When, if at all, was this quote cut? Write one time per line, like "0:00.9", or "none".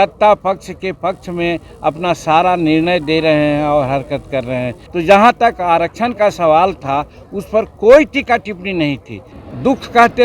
0:04.8
0:09.4